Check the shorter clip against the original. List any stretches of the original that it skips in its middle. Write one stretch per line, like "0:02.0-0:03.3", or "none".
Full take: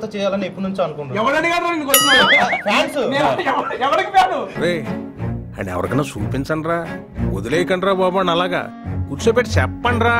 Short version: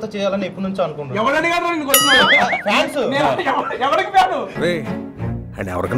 none